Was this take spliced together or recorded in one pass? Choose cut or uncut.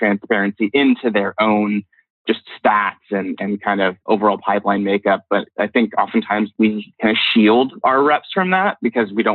cut